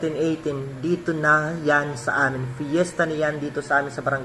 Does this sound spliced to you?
no; 0 cuts

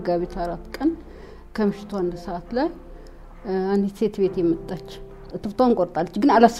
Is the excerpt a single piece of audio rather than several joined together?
no; 1 cut; at 5.4 s

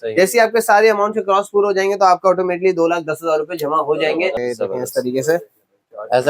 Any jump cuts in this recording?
yes; 1 cut; at 4.4 s

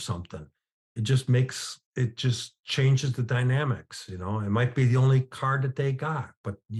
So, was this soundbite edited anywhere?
no; 0 cuts

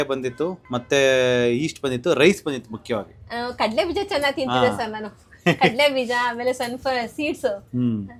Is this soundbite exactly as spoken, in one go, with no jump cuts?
yes; 0 cuts

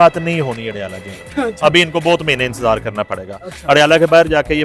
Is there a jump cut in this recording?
no; 0 cuts

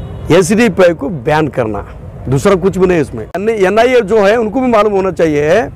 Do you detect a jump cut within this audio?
yes; 1 cut; at 3.4 s

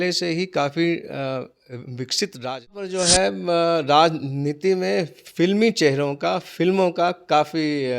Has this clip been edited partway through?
yes; 1 cut; at 2.9 s

